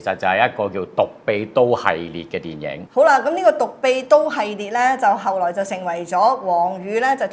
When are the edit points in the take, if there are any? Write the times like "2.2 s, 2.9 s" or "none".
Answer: 2.8 s